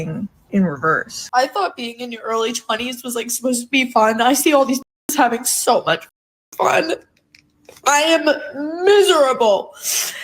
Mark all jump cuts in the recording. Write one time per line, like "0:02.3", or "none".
0:01.2